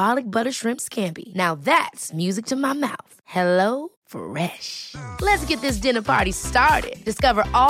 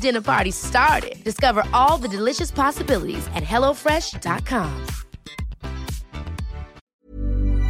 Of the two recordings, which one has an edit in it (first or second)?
second